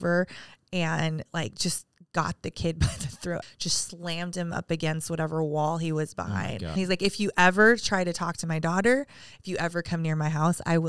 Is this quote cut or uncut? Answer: cut